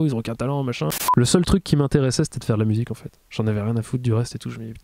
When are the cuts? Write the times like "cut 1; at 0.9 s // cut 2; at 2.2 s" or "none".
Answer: cut 1; at 0.9 s